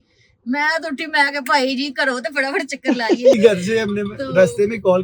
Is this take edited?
yes; 1 cut; at 3.3 s

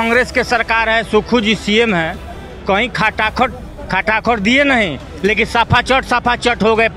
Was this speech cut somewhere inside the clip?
no; 0 cuts

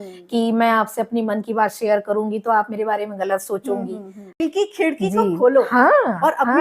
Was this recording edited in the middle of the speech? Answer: yes; 1 cut; at 4.4 s

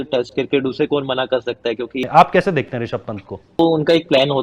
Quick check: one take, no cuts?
no; 2 cuts; at 2.0 s, 3.6 s

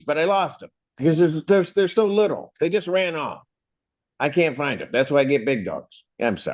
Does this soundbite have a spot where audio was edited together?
no; 0 cuts

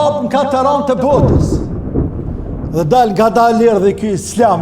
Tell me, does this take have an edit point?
yes; 1 cut; at 2.6 s

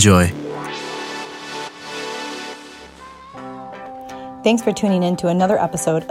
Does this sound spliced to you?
yes; 1 cut; at 3.2 s

